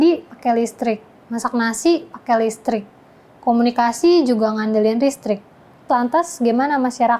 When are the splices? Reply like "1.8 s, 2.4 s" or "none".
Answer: 5.9 s